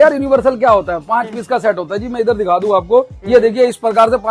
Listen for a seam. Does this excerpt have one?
no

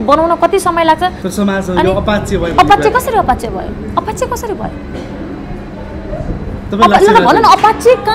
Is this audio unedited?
no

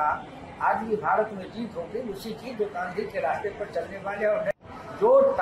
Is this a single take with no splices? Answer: no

